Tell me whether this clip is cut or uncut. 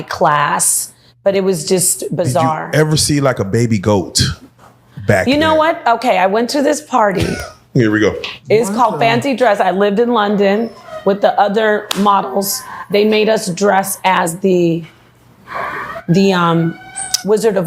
cut